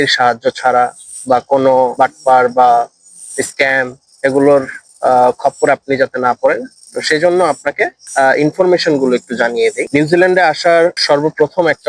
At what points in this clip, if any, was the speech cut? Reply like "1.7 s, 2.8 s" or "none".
none